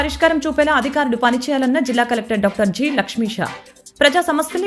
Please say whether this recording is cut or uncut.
uncut